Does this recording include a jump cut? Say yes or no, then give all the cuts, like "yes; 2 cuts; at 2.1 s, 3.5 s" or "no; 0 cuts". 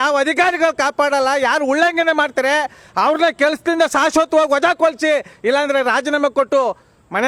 no; 0 cuts